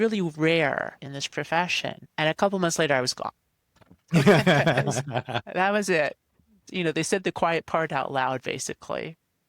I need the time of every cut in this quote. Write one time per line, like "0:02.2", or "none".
0:01.1
0:02.0
0:06.6